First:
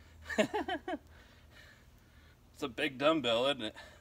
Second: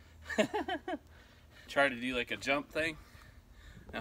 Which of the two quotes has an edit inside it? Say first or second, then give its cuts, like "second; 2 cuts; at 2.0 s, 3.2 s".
second; 1 cut; at 1.7 s